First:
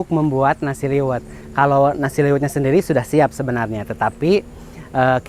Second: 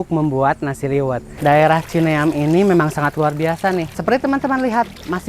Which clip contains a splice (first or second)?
second